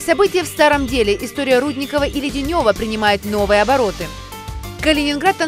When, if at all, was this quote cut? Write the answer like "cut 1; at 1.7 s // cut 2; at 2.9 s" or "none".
none

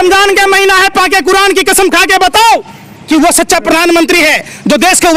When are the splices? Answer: none

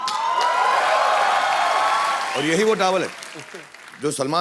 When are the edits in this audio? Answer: cut 1; at 2.3 s

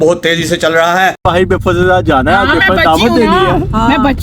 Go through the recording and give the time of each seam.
cut 1; at 1.2 s

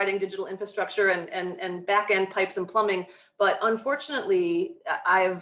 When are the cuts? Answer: none

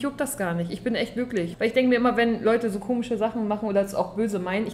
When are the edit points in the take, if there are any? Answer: cut 1; at 1.5 s

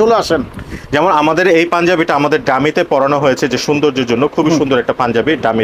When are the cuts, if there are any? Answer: none

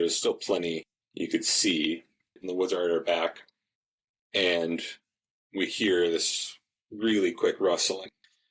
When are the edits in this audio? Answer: cut 1; at 1.0 s // cut 2; at 2.4 s

